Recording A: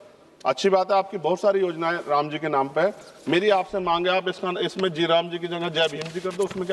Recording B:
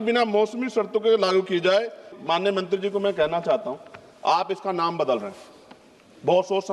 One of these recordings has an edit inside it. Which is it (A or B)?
B